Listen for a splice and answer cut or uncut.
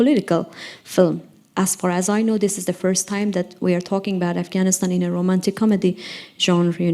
cut